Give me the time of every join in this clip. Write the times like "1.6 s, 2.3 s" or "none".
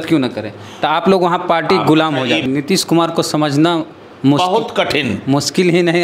2.5 s